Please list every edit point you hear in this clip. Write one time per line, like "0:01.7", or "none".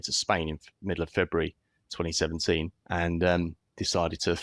0:02.8